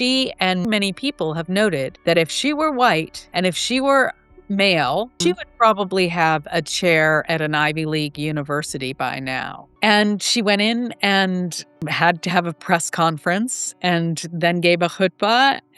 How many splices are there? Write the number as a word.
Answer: four